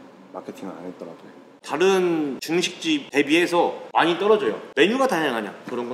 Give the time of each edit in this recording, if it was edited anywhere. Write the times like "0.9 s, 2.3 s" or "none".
1.4 s, 2.7 s, 3.8 s, 4.6 s